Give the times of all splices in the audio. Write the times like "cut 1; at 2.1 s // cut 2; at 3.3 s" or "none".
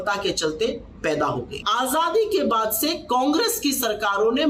cut 1; at 1.6 s